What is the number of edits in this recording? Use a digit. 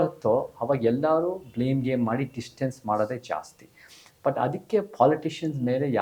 0